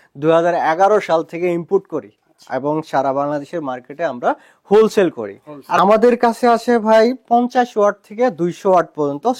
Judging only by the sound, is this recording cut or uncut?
cut